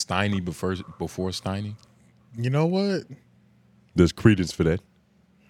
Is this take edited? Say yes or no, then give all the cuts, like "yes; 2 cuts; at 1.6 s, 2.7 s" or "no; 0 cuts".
no; 0 cuts